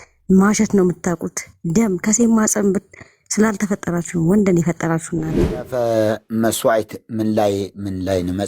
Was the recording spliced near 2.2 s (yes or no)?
no